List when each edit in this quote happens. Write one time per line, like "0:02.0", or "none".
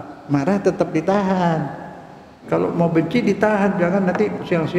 0:02.3